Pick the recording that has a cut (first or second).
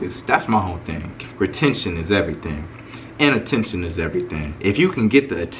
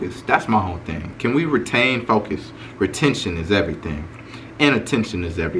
first